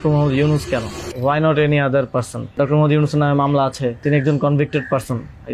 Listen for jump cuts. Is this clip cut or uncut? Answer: cut